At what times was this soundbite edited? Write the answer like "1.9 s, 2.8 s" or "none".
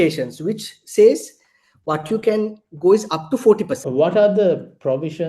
3.8 s

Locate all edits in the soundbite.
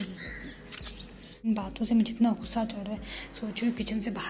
1.5 s

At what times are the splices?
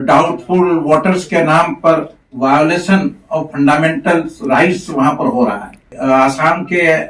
5.9 s

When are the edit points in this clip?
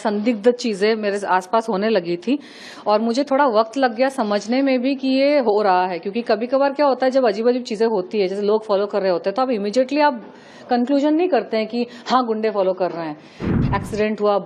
13.4 s

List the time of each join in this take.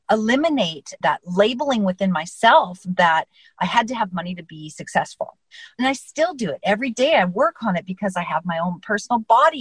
none

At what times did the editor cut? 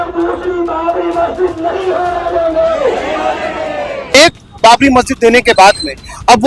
4.1 s

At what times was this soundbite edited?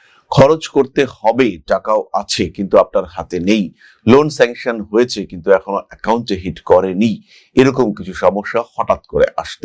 none

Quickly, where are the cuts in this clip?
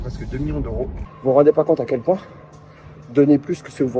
1.0 s

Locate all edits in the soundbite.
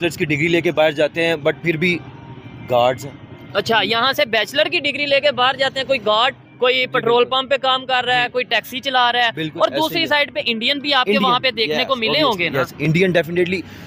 none

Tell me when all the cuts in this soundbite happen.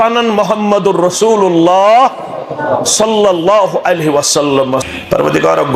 4.9 s

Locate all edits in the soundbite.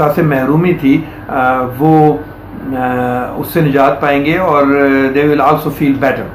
none

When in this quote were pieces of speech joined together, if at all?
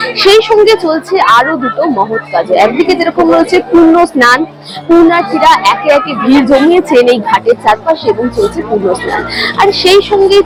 none

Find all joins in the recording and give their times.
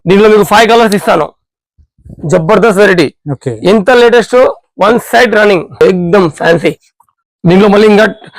5.8 s

